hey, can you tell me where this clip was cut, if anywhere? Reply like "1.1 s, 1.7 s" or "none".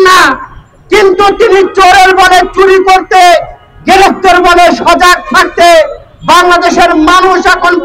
none